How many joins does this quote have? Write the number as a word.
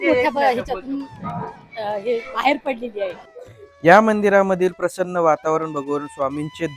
zero